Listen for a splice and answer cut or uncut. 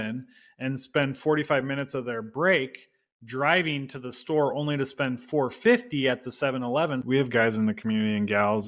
cut